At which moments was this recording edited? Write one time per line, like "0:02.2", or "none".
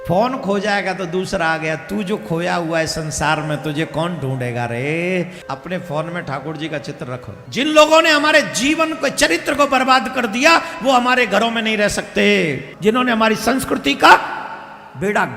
0:05.4
0:07.4
0:12.7